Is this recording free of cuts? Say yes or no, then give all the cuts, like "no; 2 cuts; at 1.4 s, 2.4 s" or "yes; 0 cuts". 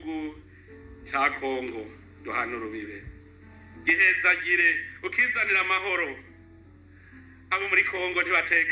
no; 1 cut; at 1.5 s